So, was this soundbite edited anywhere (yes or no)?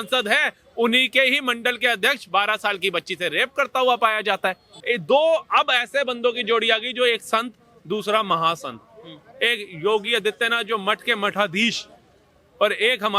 yes